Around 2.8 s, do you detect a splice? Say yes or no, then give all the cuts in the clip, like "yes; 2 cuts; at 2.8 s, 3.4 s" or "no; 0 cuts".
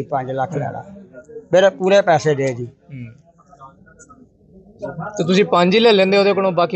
no; 0 cuts